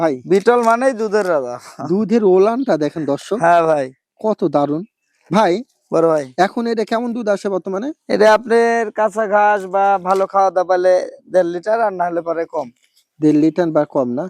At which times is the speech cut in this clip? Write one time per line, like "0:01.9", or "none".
none